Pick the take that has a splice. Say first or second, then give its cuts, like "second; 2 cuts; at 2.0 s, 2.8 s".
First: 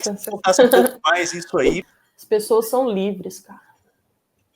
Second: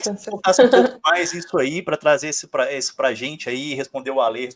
first; 1 cut; at 1.8 s